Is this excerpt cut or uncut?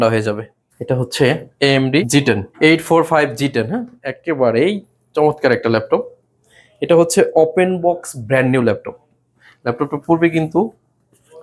uncut